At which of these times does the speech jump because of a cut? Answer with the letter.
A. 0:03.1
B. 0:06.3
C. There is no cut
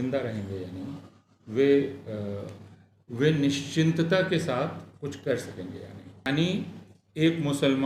B